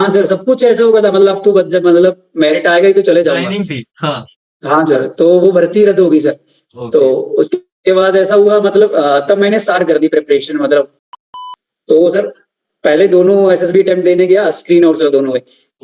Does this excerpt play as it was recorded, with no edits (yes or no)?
no